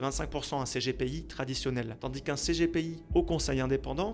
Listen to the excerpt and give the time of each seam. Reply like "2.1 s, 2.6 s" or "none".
1.9 s, 3.0 s